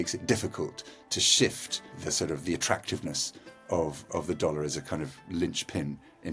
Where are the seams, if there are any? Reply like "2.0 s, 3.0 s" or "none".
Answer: 2.0 s, 4.1 s